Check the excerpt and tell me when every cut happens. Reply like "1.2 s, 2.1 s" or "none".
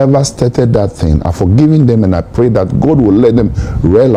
none